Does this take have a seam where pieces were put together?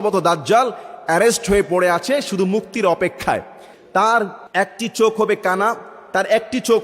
yes; 2 cuts; at 3.7 s, 4.4 s

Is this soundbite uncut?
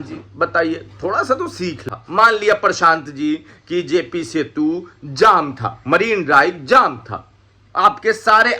no; 1 cut; at 1.9 s

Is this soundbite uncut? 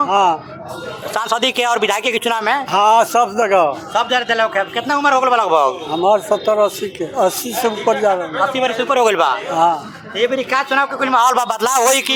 yes; 0 cuts

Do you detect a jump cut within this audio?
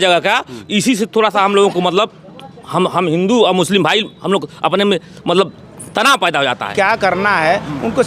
yes; 1 cut; at 6.7 s

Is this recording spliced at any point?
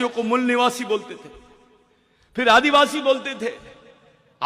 no; 0 cuts

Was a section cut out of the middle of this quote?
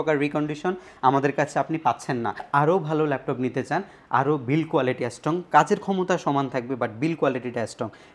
yes; 1 cut; at 2.5 s

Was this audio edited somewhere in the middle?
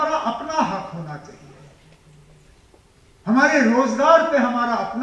no; 0 cuts

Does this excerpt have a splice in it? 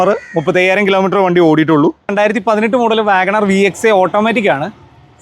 yes; 1 cut; at 2.1 s

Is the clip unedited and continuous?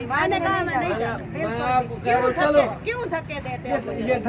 yes; 0 cuts

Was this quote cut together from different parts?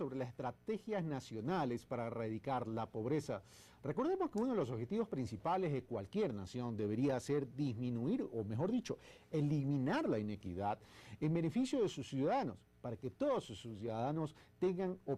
no; 0 cuts

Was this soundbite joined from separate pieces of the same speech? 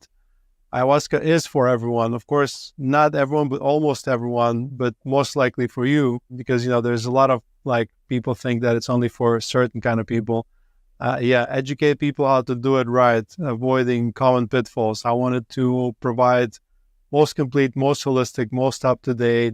yes; 1 cut; at 6.4 s

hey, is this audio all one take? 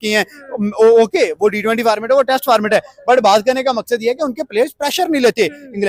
yes; 0 cuts

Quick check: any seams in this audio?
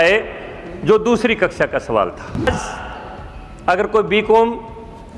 yes; 1 cut; at 2.5 s

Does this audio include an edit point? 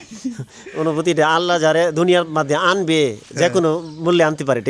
no; 0 cuts

